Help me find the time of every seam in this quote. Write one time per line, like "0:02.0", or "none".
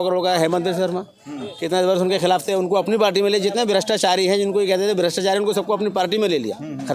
none